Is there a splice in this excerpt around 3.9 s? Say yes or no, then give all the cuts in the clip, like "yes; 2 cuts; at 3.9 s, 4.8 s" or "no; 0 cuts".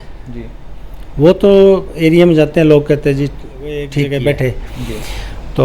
yes; 1 cut; at 3.9 s